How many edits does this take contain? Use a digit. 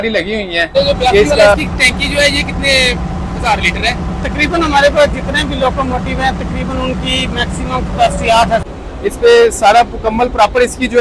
2